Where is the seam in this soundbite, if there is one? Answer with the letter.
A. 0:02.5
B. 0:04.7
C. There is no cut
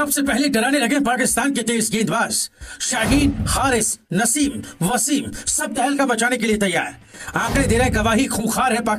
C